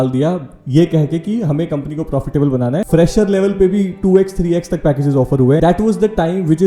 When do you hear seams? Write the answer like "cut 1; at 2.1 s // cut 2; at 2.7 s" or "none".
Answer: cut 1; at 2.9 s // cut 2; at 5.6 s